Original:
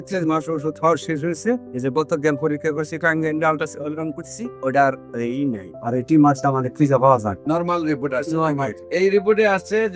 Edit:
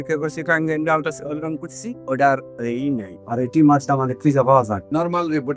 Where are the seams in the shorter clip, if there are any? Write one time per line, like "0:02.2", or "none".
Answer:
none